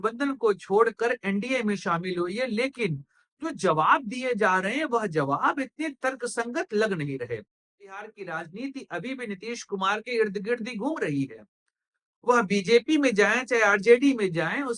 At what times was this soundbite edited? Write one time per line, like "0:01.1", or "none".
0:07.9